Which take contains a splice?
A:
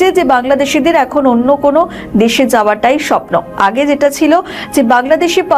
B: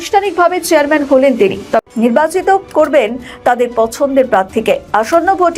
B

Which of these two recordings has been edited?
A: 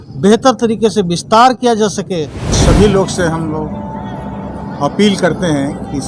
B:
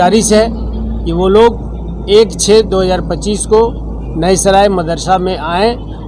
A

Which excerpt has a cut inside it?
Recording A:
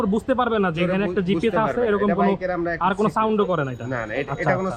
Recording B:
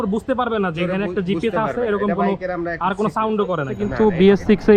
B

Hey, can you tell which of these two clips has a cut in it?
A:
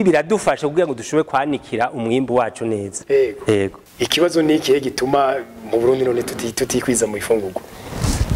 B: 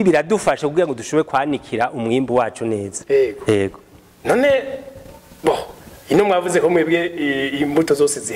A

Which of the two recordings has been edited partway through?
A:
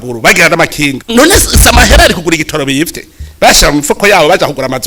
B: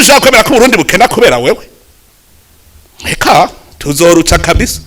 A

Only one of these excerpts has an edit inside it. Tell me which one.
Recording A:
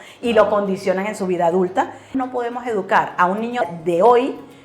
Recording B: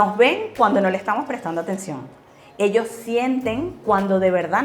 A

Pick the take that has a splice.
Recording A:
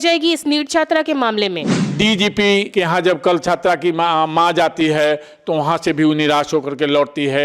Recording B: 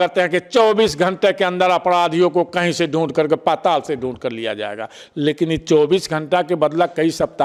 A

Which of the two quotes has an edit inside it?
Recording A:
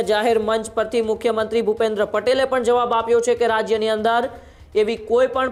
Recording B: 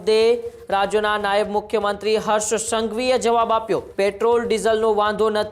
B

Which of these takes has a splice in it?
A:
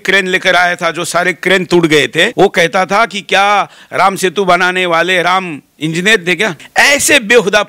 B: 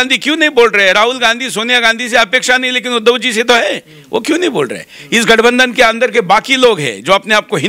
A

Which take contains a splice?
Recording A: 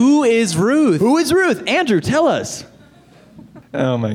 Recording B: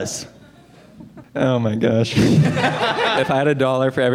B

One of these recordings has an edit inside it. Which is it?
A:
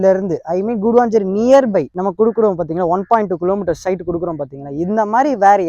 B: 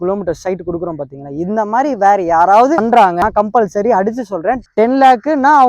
B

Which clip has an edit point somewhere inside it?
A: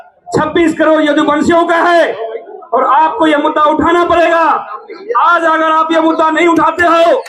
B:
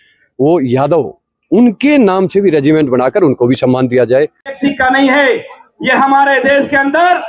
B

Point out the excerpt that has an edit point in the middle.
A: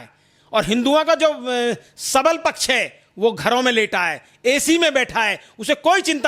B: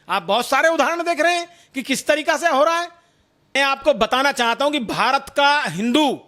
B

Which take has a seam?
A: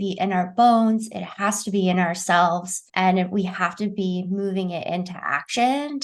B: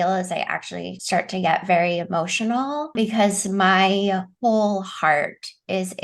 B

